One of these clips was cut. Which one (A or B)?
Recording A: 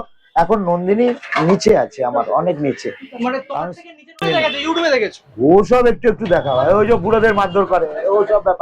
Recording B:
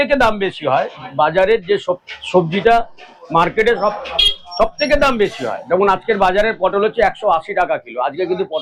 A